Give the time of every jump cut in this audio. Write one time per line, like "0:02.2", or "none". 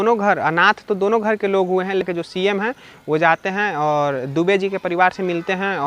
0:02.0